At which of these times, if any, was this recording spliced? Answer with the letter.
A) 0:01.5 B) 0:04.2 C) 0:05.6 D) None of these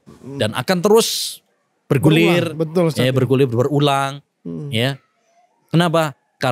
D